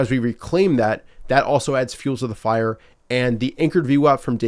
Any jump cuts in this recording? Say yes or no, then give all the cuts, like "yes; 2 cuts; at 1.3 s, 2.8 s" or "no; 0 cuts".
no; 0 cuts